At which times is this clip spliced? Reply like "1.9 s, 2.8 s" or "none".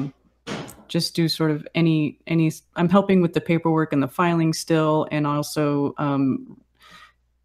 5.3 s